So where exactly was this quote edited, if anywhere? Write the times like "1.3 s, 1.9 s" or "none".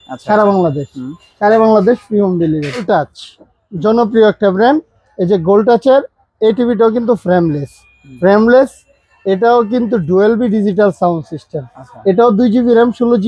2.8 s